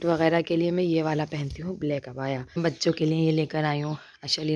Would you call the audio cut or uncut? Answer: cut